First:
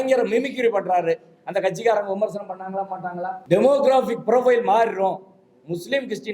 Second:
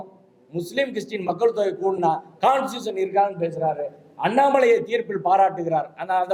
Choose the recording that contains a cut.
first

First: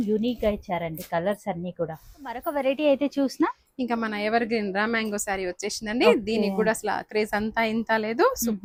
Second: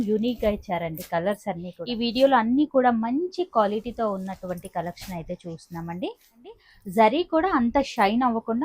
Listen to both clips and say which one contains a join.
second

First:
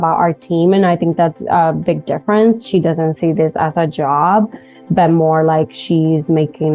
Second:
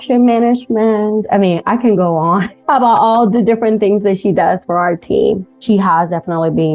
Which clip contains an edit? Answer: second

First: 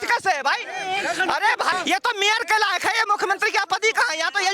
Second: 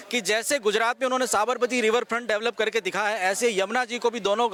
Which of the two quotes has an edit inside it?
first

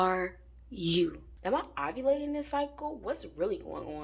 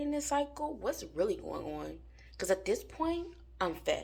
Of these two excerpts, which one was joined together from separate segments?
first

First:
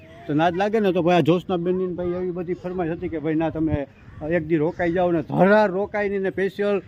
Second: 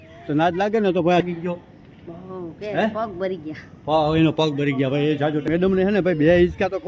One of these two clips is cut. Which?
second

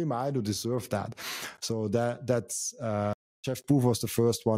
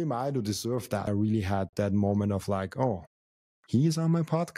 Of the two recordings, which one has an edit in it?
second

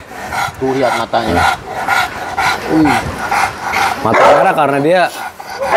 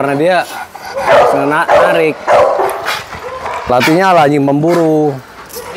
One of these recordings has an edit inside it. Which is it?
second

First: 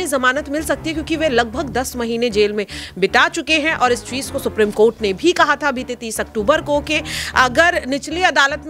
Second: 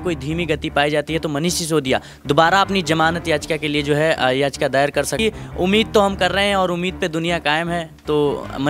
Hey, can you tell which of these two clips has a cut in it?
second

